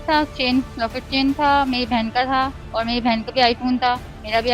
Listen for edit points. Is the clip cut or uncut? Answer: uncut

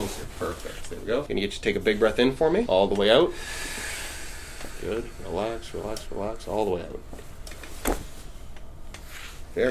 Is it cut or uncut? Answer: cut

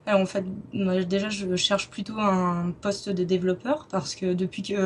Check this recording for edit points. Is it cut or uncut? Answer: uncut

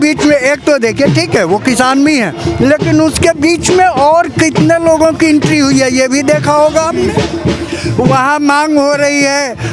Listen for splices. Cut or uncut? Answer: uncut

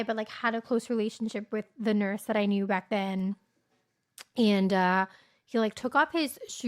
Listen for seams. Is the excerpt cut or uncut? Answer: uncut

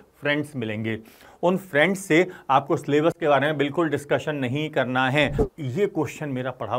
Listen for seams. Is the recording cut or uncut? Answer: cut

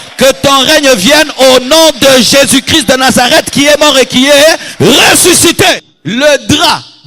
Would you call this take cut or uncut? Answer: cut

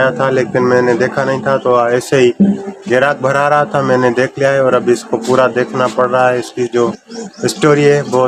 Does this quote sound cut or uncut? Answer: uncut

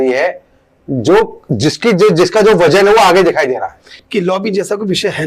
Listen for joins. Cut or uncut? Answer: cut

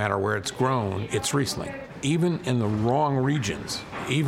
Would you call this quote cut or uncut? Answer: cut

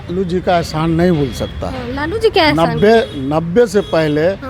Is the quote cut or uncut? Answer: uncut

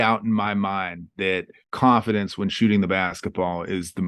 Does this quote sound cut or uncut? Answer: cut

